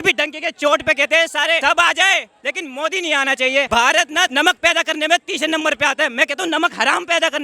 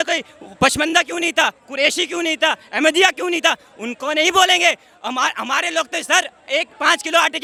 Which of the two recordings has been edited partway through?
first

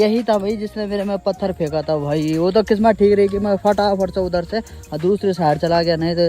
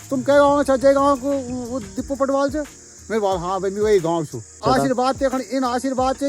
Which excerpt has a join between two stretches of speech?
second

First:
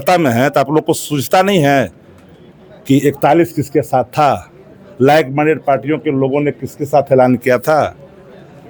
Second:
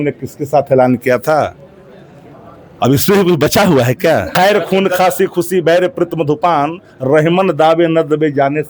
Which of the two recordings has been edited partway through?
second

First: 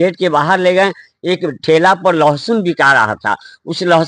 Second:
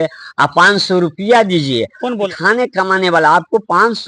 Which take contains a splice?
second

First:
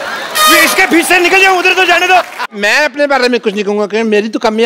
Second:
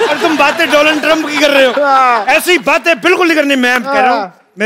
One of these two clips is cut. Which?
first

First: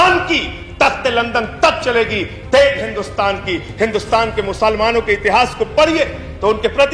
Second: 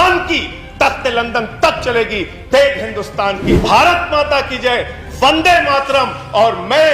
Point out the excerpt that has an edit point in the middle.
second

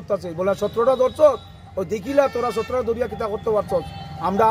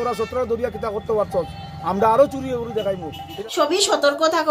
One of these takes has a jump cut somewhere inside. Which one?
second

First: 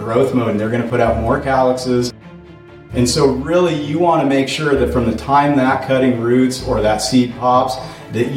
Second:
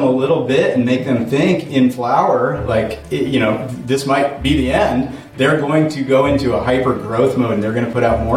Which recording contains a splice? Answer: first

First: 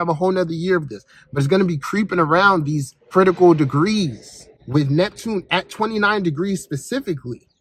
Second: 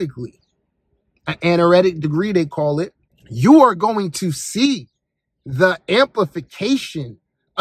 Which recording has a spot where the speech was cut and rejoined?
first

